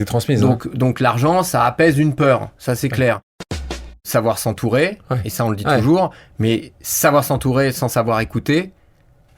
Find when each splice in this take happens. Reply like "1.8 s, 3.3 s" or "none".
3.7 s